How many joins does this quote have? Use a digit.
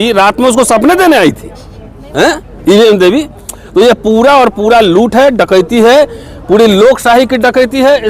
0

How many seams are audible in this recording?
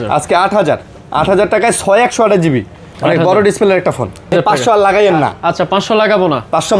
1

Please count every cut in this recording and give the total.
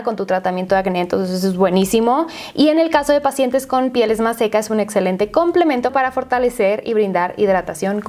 0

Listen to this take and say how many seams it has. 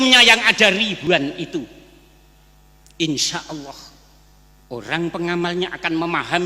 1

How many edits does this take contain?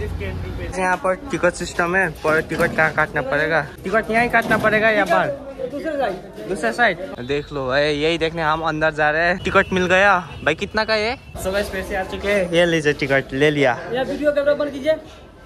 5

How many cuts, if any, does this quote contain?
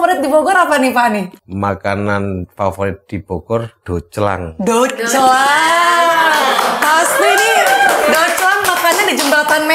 1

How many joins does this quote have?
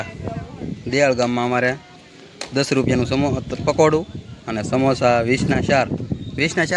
0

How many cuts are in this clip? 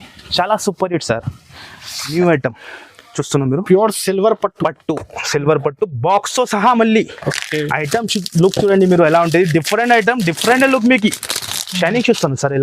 1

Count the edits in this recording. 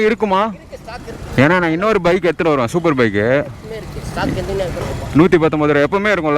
1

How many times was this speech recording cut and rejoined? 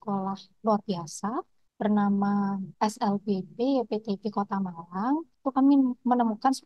3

